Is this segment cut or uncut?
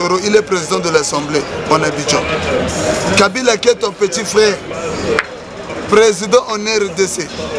uncut